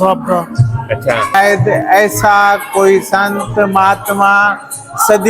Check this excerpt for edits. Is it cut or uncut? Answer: cut